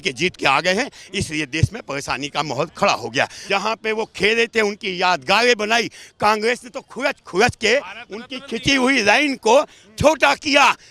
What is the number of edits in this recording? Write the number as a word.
one